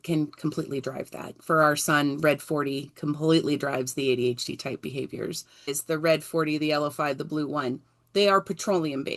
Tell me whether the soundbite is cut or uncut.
cut